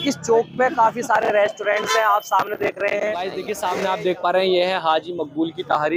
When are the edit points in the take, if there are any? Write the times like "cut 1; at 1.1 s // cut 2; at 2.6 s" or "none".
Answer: cut 1; at 3.6 s